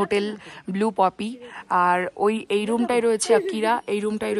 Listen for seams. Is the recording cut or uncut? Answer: uncut